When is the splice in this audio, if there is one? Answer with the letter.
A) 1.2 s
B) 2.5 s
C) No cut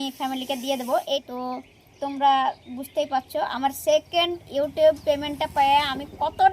A